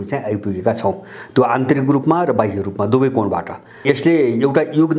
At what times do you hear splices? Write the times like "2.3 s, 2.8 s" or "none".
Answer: 3.8 s